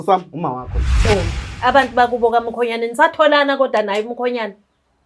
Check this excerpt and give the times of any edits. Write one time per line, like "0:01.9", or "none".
0:01.0